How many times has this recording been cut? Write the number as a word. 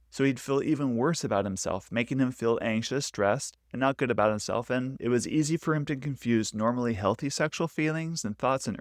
one